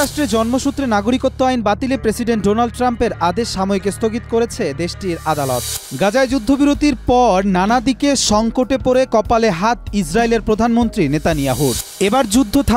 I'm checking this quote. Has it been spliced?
yes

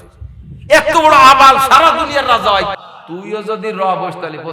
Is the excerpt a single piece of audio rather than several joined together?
no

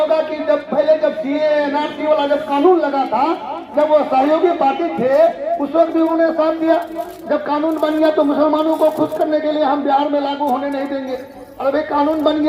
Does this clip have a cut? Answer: no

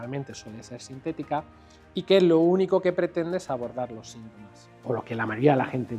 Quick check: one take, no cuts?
no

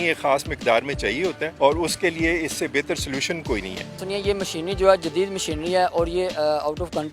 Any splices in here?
yes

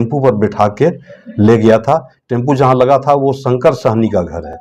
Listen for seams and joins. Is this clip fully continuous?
yes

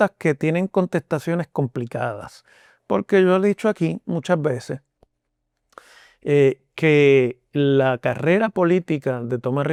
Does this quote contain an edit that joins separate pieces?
no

